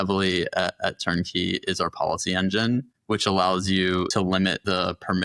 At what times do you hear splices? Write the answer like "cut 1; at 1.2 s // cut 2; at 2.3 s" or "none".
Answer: cut 1; at 4.3 s